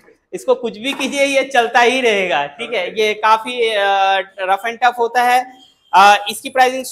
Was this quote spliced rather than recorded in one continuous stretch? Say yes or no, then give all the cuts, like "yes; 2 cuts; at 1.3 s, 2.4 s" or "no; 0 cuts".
no; 0 cuts